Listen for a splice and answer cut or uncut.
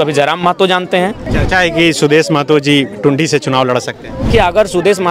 cut